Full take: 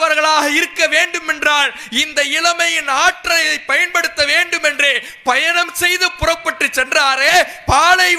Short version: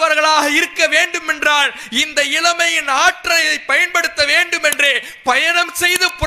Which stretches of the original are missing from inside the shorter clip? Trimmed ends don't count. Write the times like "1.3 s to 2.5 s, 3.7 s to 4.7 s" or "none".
none